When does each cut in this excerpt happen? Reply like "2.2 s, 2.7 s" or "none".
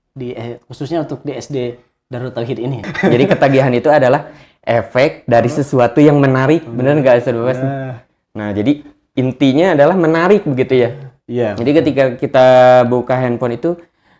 2.9 s